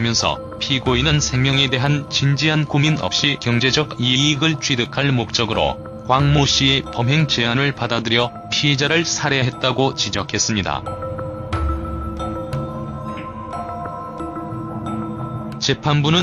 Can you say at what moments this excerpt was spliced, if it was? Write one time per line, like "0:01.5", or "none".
none